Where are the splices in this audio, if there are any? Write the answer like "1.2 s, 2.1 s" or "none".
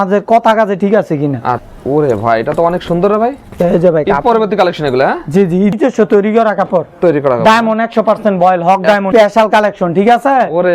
1.6 s, 5.7 s, 9.1 s